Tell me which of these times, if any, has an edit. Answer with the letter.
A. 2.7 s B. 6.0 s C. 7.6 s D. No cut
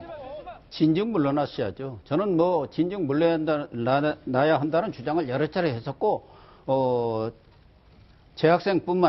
B